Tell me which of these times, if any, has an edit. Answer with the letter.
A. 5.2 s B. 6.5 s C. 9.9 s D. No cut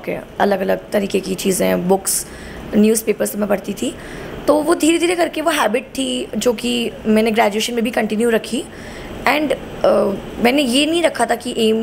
D